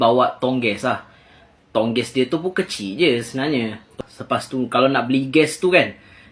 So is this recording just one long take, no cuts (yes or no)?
no